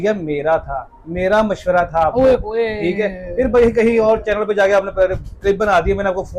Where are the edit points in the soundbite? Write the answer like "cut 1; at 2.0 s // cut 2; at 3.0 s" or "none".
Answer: none